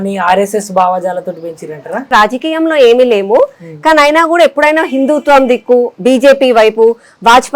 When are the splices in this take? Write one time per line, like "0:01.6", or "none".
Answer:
0:02.1